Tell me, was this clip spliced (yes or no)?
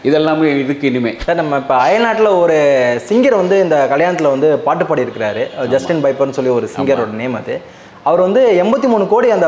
yes